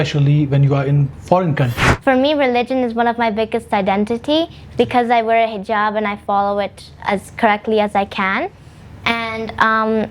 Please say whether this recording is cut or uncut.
cut